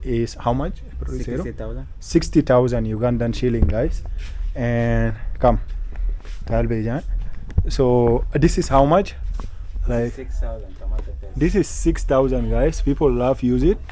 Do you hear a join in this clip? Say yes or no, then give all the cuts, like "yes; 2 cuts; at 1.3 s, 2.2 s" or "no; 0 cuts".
no; 0 cuts